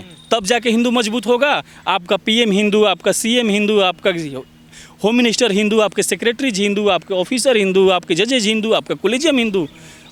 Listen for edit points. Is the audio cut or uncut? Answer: uncut